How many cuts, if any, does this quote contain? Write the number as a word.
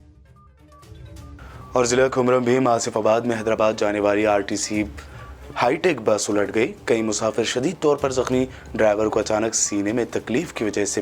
one